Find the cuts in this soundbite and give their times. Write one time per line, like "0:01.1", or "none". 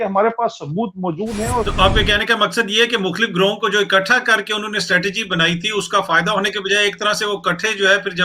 0:01.7